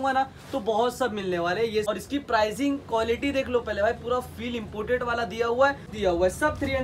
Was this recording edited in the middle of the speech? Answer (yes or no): yes